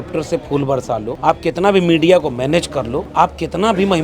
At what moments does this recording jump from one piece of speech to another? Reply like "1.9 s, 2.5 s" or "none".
1.1 s, 3.0 s